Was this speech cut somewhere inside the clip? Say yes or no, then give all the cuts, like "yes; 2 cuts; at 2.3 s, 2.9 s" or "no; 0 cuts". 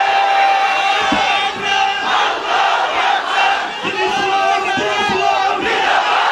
no; 0 cuts